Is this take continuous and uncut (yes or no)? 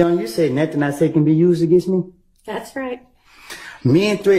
yes